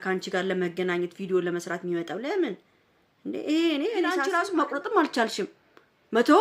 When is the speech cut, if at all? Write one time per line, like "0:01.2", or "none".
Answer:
0:04.2